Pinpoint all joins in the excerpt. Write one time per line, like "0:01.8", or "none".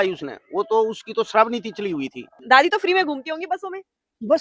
0:02.3